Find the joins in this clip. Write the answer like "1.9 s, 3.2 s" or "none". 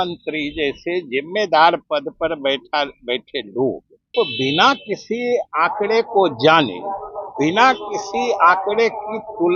4.1 s